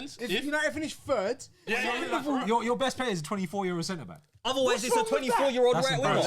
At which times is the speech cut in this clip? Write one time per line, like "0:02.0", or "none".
0:01.9

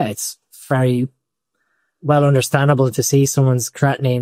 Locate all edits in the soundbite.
none

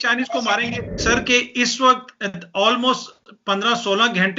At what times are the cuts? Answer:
0:01.0

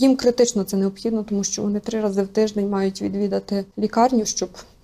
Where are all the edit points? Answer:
0:03.7

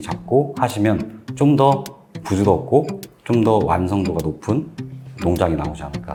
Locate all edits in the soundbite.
none

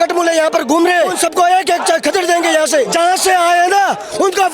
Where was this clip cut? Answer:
0:01.1
0:02.9

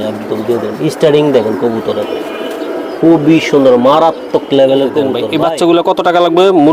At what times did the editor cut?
0:05.2

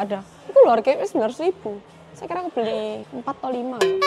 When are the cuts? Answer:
0:03.1

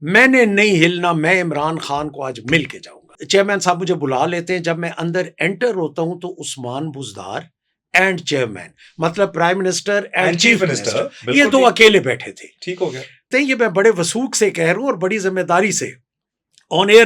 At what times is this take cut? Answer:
0:03.1
0:13.3

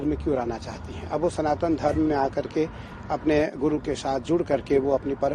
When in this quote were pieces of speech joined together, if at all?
none

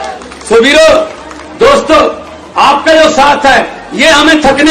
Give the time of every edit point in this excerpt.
none

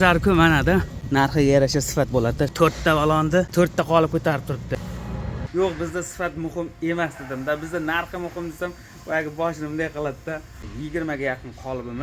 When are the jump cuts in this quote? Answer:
0:01.0
0:02.5
0:03.5
0:05.3
0:10.7

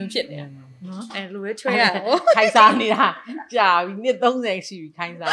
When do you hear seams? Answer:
none

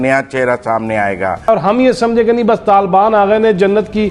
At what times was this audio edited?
0:01.5

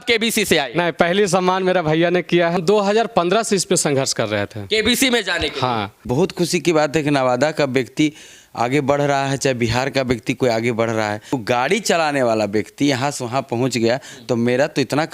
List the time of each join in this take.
0:02.6
0:06.1
0:11.4

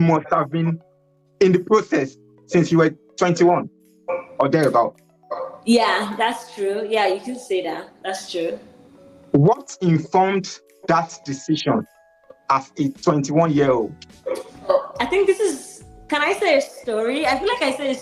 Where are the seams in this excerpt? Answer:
0:14.7

